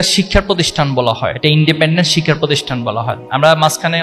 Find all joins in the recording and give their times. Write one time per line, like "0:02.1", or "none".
0:01.4